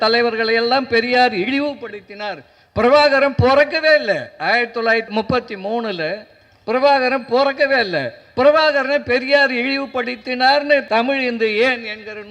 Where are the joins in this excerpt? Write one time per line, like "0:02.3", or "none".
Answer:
0:05.1
0:10.8